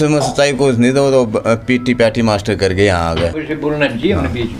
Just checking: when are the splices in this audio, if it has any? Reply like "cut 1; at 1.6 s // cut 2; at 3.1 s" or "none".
cut 1; at 3.4 s